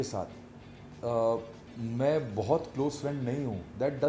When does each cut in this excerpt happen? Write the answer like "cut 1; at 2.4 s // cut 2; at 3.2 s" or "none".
none